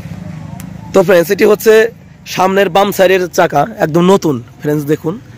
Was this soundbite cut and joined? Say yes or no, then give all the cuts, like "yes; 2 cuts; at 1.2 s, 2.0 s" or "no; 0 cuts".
no; 0 cuts